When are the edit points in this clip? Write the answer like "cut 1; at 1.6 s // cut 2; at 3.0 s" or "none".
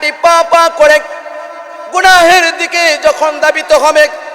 none